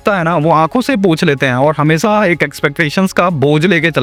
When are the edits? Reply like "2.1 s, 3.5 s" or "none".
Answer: none